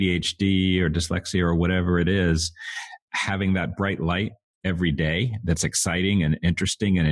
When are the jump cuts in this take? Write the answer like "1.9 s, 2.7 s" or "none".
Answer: none